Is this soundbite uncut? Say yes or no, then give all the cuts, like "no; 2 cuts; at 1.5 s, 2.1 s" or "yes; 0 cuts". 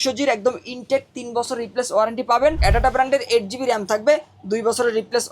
no; 1 cut; at 2.6 s